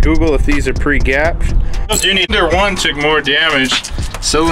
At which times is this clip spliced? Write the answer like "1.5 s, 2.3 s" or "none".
2.3 s